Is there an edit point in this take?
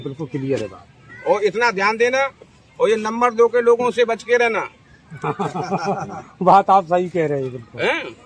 no; 0 cuts

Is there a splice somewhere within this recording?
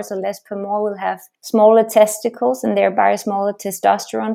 yes; 1 cut; at 1.3 s

